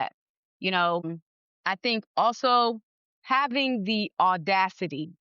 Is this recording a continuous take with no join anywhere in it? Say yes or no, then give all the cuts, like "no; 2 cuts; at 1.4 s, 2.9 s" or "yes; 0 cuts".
no; 1 cut; at 1.1 s